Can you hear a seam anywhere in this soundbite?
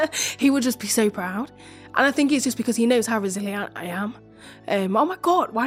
no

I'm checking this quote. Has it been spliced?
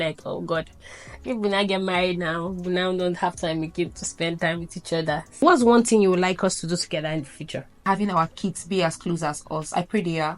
yes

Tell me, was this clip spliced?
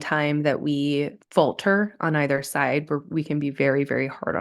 yes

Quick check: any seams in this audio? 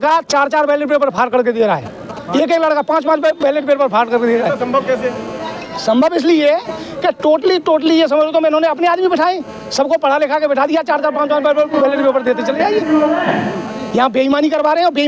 no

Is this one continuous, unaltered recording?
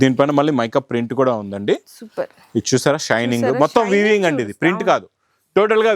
yes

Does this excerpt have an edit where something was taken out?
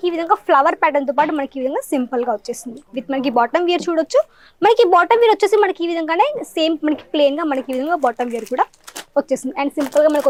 no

